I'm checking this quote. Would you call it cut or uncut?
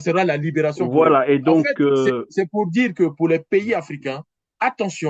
uncut